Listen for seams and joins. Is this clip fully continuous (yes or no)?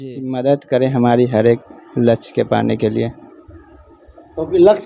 yes